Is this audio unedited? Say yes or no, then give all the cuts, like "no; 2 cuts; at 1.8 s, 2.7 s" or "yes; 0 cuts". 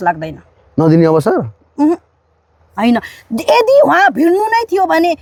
yes; 0 cuts